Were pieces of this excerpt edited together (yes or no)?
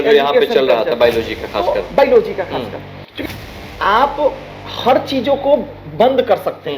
yes